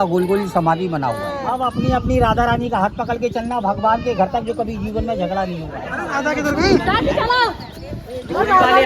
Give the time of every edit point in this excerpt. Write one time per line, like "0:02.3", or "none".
0:01.3
0:05.9